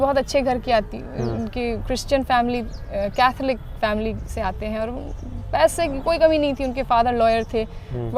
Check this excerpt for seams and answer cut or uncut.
uncut